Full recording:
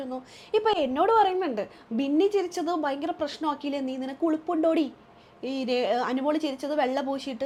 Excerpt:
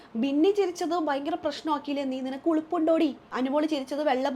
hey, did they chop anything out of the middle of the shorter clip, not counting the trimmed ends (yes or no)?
yes